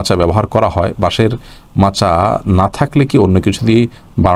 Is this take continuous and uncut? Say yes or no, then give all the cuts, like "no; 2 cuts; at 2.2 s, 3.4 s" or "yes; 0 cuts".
yes; 0 cuts